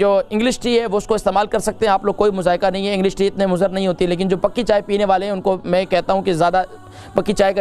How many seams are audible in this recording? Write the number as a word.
zero